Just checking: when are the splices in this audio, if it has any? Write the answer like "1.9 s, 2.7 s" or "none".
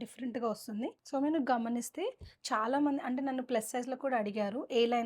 1.0 s